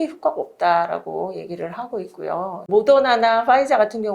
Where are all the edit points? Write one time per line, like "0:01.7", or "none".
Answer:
0:02.6